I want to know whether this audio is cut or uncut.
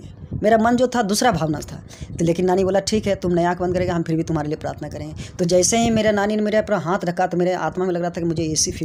uncut